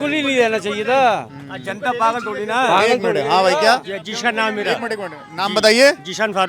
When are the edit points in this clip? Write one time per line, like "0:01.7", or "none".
none